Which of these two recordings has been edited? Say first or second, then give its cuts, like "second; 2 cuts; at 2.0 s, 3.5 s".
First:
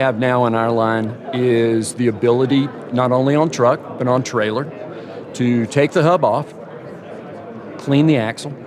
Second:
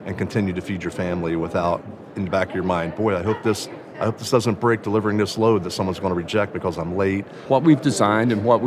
second; 1 cut; at 7.4 s